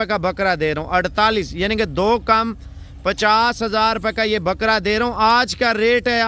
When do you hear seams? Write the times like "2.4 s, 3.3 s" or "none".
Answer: none